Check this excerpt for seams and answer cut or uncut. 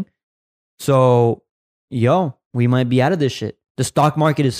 uncut